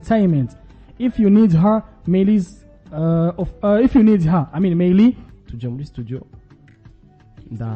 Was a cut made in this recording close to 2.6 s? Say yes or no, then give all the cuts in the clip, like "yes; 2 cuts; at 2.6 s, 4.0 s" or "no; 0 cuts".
no; 1 cut; at 5.3 s